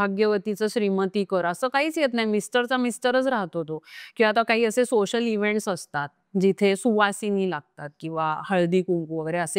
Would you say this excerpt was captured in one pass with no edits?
yes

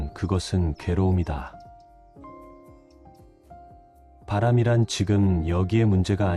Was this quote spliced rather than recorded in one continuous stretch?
no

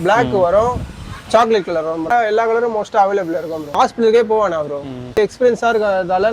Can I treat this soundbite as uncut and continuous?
no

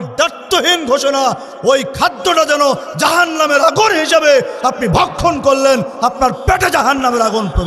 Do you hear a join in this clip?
no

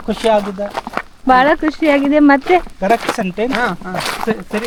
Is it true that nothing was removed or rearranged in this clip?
yes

